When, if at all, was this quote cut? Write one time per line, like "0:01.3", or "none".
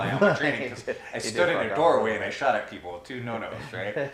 none